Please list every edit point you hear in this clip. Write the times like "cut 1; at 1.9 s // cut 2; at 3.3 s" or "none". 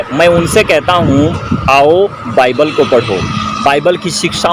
none